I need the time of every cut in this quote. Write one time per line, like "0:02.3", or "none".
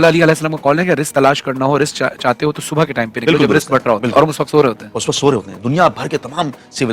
none